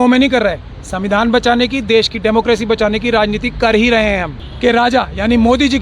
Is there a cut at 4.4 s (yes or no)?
yes